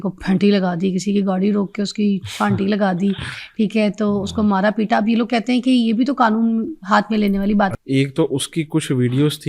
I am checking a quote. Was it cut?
yes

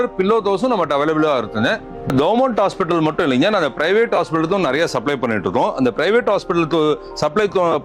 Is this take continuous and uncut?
yes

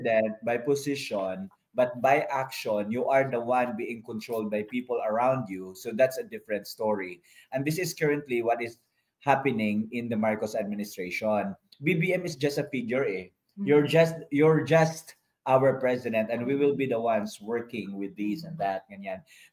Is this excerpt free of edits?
yes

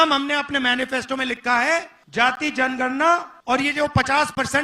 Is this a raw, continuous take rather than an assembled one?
no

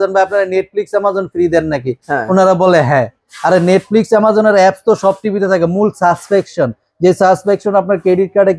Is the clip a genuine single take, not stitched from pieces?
yes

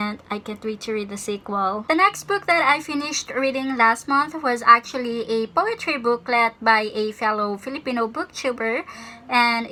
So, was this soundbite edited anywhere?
no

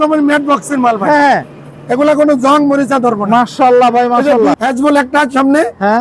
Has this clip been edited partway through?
yes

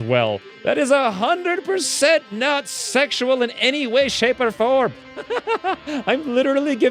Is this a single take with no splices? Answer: no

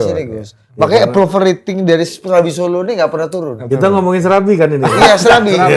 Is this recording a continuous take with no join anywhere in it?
yes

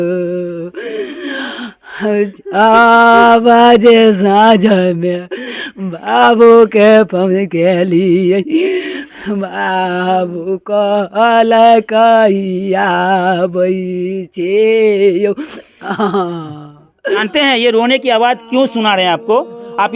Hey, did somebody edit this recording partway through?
yes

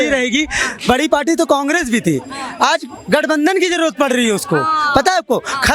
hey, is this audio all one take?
yes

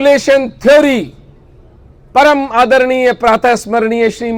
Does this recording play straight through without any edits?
yes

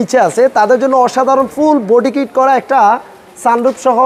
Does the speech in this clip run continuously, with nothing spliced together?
yes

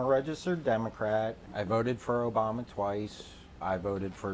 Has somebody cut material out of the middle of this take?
yes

